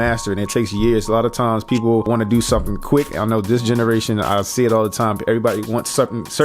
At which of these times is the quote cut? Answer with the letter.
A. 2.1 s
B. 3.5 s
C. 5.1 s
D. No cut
A